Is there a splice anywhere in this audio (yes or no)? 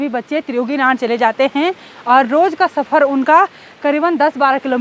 no